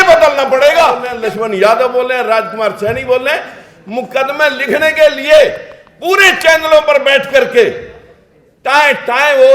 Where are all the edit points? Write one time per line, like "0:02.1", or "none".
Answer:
0:01.1